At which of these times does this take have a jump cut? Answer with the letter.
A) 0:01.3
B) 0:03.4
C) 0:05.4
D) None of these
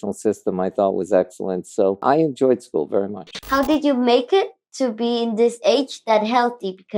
B